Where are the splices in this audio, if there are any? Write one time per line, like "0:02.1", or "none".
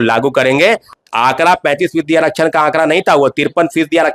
0:00.9